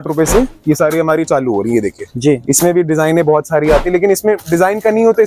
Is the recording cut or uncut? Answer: uncut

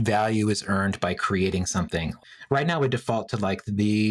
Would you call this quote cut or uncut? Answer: cut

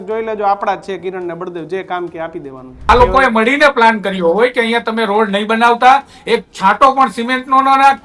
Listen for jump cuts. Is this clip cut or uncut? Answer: cut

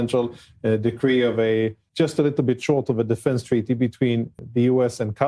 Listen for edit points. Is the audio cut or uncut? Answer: cut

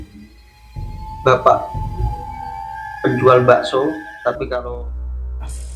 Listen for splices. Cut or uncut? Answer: cut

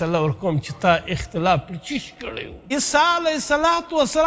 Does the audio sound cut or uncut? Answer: cut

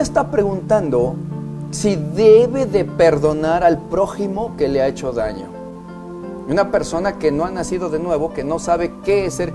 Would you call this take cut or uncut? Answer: uncut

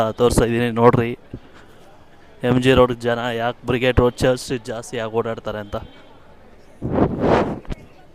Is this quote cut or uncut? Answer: uncut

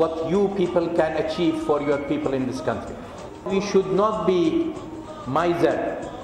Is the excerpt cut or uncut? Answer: cut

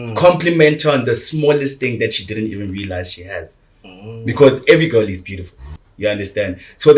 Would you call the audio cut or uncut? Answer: uncut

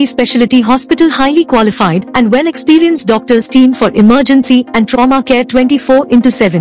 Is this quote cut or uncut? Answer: uncut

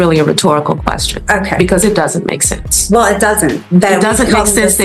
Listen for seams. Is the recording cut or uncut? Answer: uncut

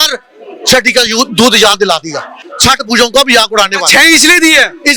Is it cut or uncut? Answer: uncut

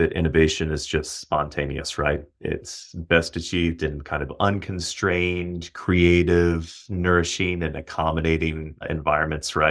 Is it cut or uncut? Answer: cut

